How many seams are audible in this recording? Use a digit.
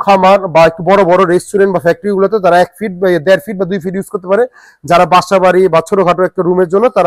0